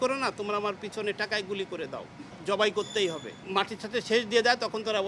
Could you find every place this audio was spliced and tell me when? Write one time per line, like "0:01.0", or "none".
0:02.3
0:03.4